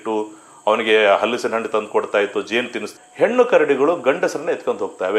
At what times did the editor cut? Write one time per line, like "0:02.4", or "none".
0:02.9